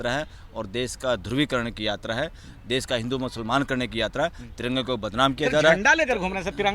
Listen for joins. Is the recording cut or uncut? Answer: uncut